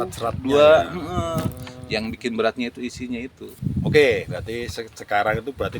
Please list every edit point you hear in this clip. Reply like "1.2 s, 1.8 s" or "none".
3.5 s